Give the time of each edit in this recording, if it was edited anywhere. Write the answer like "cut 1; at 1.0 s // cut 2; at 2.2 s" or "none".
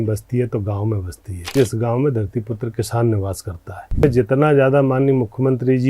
cut 1; at 1.5 s // cut 2; at 4.0 s